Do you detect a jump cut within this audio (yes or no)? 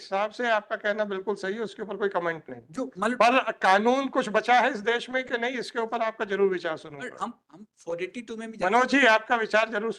no